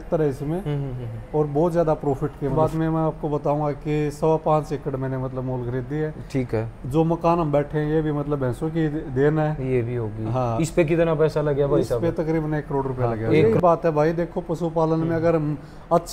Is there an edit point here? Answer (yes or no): yes